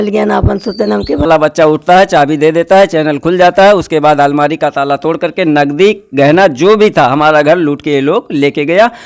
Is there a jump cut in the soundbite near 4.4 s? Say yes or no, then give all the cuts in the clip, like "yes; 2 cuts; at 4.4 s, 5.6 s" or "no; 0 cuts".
no; 1 cut; at 1.3 s